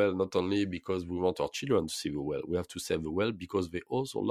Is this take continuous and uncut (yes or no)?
yes